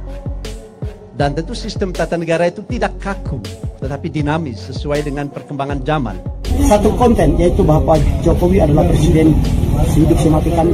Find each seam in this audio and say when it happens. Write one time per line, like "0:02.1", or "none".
0:06.4